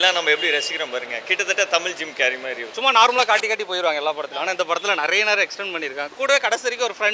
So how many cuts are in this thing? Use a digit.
1